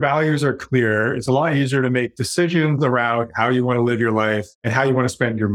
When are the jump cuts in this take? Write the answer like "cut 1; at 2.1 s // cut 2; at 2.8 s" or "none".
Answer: cut 1; at 4.6 s